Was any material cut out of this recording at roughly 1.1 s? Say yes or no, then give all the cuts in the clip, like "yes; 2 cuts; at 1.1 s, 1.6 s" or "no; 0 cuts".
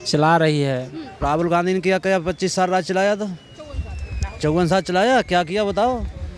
yes; 1 cut; at 1.1 s